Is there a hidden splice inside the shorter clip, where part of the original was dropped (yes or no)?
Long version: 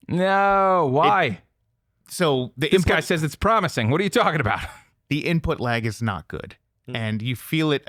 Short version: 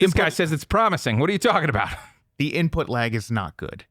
no